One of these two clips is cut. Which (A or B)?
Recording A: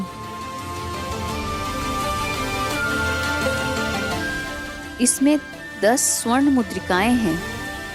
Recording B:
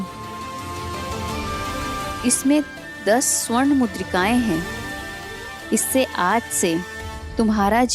B